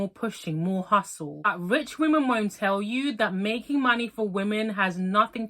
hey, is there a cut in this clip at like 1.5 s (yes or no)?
yes